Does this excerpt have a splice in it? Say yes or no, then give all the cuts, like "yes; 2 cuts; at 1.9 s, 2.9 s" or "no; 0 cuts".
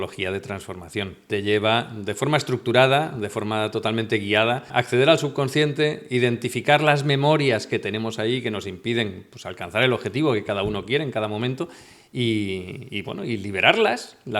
yes; 2 cuts; at 1.3 s, 4.7 s